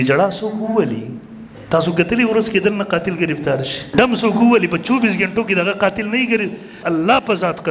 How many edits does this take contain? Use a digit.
2